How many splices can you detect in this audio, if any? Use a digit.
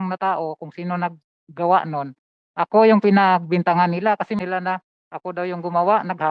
1